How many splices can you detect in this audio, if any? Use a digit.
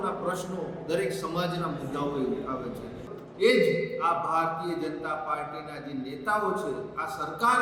1